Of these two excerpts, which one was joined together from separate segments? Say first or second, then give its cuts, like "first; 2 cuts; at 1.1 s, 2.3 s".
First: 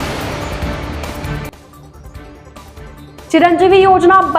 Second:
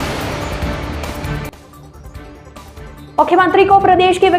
second; 1 cut; at 3.1 s